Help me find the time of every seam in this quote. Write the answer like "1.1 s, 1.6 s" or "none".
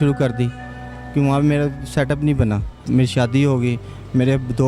2.8 s

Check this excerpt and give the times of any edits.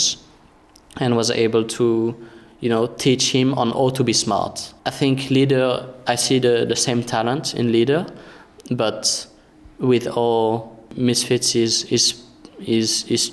4.6 s, 10.9 s

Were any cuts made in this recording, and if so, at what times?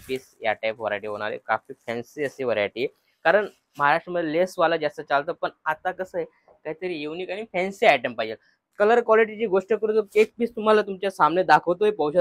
8.6 s

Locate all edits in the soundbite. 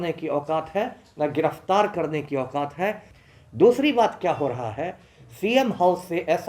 3.1 s

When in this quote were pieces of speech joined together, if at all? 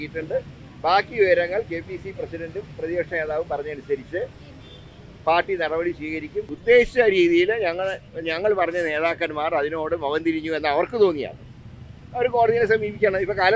6.5 s

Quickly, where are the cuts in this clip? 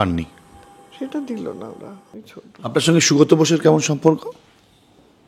2.2 s

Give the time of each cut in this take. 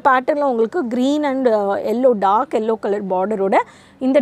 none

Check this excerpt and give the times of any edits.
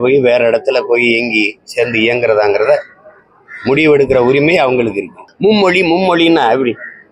5.2 s

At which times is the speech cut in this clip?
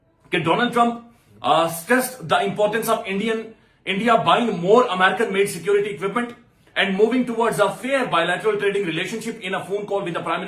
none

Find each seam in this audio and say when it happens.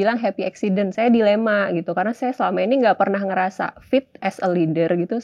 0.9 s

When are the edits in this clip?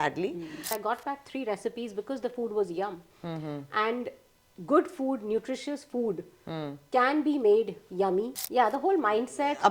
0.8 s, 8.4 s

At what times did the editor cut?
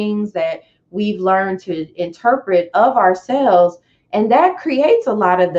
none

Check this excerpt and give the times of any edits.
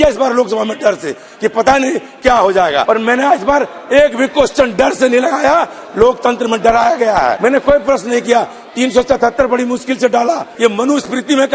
2.8 s, 7.4 s, 10.5 s

